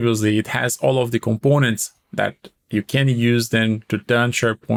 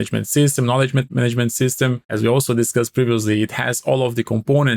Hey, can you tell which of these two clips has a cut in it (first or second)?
second